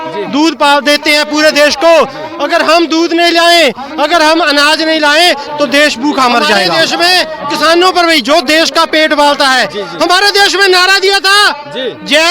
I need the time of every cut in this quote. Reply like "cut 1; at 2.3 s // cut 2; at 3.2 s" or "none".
cut 1; at 6.7 s

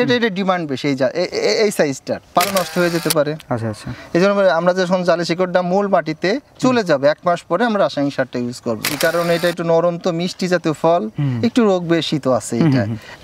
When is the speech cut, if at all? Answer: cut 1; at 2.5 s // cut 2; at 8.9 s

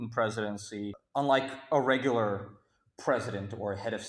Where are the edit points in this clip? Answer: cut 1; at 1.0 s

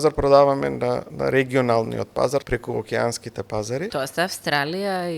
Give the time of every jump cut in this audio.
cut 1; at 1.1 s // cut 2; at 2.5 s // cut 3; at 3.9 s

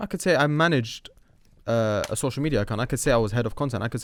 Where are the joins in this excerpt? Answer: none

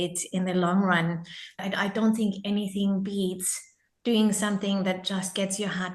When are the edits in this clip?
cut 1; at 1.5 s

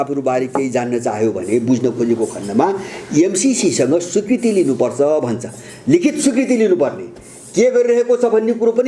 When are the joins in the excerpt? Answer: none

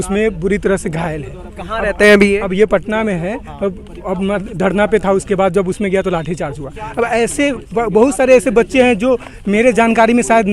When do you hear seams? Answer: none

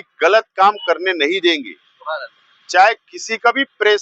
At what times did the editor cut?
none

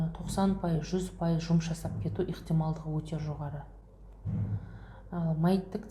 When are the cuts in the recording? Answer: none

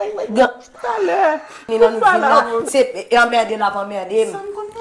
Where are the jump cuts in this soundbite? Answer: cut 1; at 2.7 s

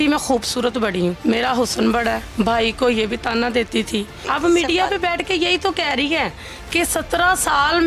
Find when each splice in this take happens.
cut 1; at 1.2 s // cut 2; at 2.2 s // cut 3; at 4.2 s

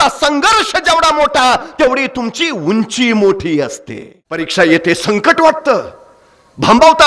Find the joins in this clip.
cut 1; at 4.5 s

